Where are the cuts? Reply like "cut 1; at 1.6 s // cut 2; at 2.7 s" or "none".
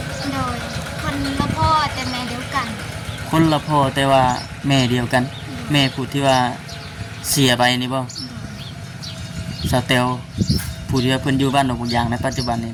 none